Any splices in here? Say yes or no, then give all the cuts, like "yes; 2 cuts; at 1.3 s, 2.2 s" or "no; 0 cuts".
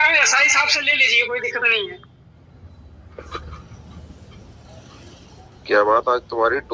no; 0 cuts